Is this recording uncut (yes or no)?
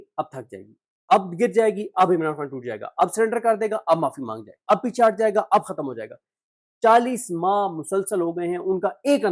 yes